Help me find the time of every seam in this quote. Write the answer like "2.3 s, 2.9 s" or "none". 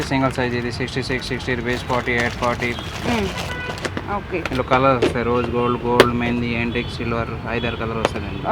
none